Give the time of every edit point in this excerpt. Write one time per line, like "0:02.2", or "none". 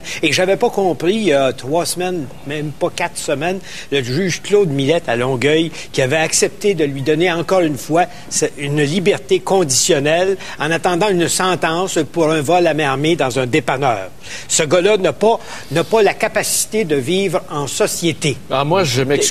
none